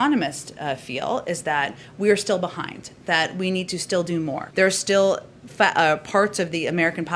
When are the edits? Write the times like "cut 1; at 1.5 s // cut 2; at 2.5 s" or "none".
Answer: cut 1; at 4.4 s

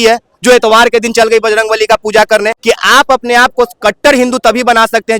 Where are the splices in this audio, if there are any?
cut 1; at 2.5 s

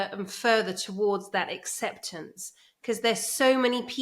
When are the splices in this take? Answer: none

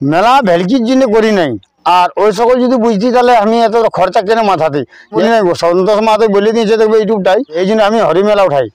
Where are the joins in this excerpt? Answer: cut 1; at 5.2 s // cut 2; at 7.6 s

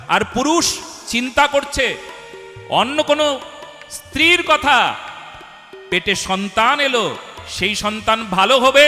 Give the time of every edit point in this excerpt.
none

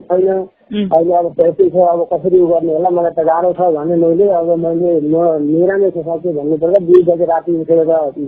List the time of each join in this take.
none

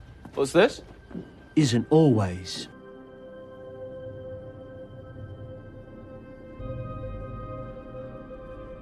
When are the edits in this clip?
none

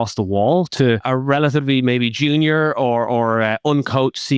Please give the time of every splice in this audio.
cut 1; at 1.0 s

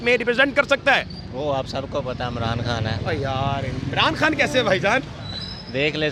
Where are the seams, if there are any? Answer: none

